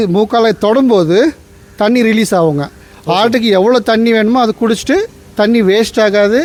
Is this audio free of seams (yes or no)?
yes